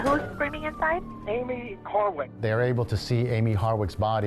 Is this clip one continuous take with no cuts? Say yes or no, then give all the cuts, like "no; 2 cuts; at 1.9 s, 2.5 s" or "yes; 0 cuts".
no; 2 cuts; at 1.1 s, 2.3 s